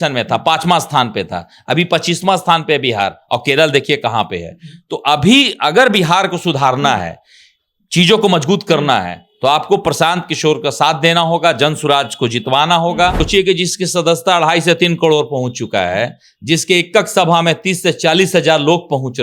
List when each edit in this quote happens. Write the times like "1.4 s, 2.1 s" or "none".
13.2 s

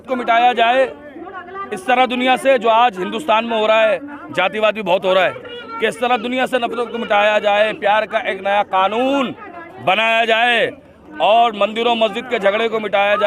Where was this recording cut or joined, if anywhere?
none

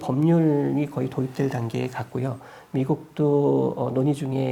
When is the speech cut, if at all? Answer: none

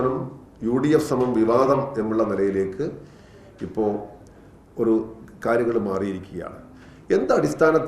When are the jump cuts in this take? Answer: none

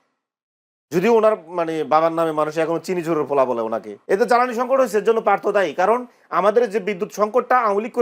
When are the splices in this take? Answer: 3.9 s

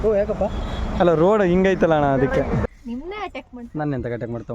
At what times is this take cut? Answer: 2.6 s

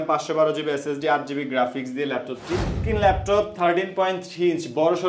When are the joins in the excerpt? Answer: 2.8 s

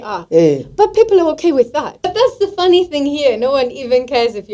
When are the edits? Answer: 2.1 s

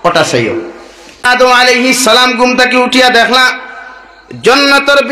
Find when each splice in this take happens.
1.3 s

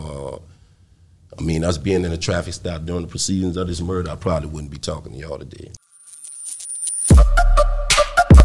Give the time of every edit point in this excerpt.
5.7 s

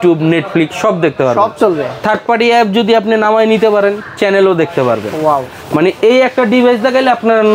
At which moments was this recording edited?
none

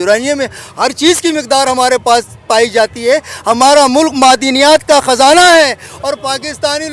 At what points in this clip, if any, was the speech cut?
none

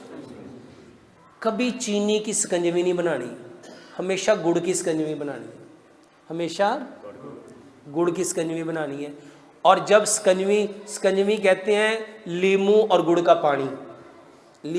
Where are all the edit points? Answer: none

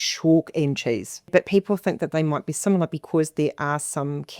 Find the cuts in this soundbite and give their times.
1.3 s

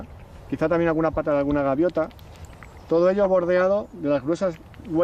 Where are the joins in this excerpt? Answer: 4.1 s

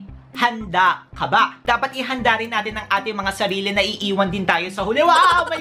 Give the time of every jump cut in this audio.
1.6 s

